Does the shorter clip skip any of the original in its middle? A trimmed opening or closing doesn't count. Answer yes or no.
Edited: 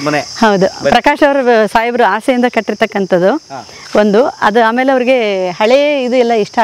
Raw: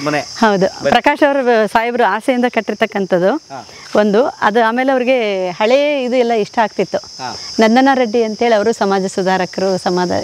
no